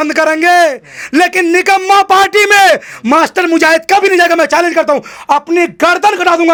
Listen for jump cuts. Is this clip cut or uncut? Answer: uncut